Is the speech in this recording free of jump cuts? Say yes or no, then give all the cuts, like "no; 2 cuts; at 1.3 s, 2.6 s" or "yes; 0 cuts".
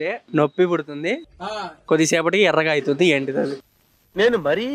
yes; 0 cuts